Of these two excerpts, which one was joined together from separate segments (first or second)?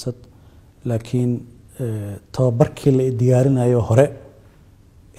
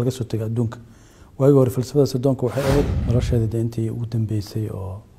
second